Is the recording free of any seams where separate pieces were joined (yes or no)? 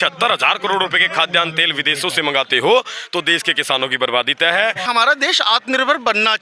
no